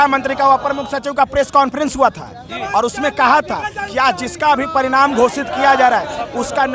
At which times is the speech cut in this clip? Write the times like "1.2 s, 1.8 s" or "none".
none